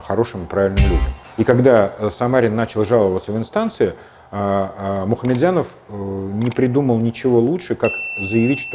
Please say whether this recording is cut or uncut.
cut